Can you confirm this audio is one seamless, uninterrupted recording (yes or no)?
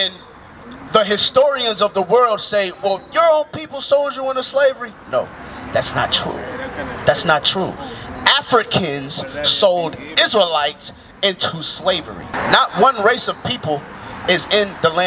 no